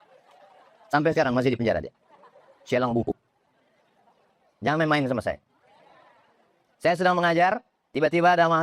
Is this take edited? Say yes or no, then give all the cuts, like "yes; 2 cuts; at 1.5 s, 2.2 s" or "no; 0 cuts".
no; 0 cuts